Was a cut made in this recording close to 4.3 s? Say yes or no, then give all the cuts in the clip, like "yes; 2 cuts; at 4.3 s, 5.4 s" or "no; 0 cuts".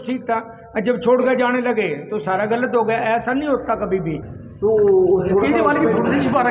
yes; 1 cut; at 4.3 s